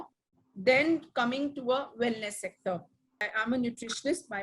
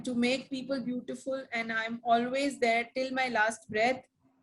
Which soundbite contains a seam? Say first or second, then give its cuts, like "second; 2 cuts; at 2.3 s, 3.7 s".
first; 1 cut; at 3.2 s